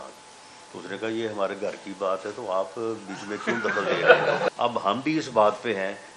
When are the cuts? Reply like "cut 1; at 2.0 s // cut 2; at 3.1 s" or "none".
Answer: cut 1; at 4.5 s